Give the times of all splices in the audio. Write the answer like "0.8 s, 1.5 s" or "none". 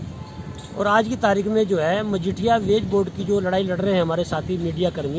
none